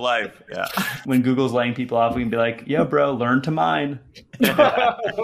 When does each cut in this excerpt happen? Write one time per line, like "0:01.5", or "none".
0:01.0